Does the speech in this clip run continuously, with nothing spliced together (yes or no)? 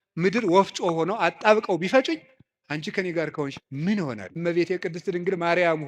no